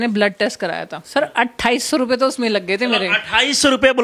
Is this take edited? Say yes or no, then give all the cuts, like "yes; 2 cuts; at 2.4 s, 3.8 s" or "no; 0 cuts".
yes; 1 cut; at 1.0 s